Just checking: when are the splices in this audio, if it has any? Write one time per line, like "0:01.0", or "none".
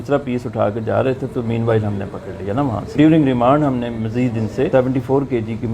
0:02.9
0:04.7